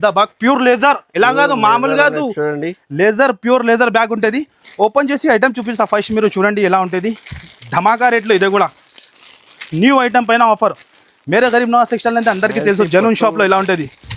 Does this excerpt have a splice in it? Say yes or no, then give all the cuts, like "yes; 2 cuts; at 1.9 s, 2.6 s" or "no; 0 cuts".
no; 0 cuts